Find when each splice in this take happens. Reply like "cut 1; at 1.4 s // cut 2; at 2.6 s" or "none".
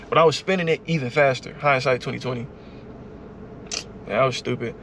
none